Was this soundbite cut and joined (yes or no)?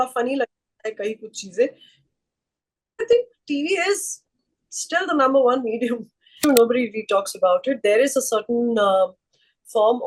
yes